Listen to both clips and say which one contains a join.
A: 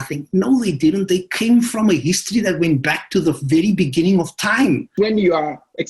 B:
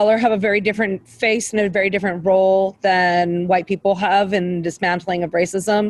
A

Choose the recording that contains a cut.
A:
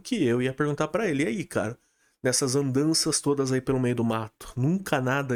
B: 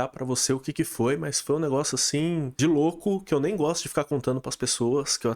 B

